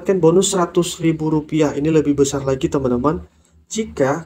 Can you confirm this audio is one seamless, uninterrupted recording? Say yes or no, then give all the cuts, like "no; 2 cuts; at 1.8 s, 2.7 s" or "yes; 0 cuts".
yes; 0 cuts